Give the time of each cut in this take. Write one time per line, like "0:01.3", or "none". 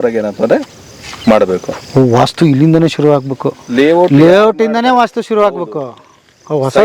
0:01.7